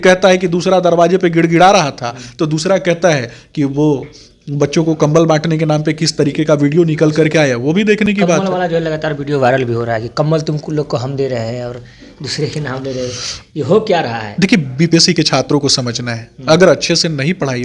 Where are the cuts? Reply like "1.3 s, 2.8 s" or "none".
none